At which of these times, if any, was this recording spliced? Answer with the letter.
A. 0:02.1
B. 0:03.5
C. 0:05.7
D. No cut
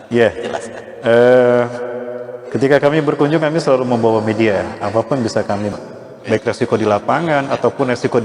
C